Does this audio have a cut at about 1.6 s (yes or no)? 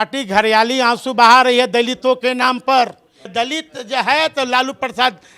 no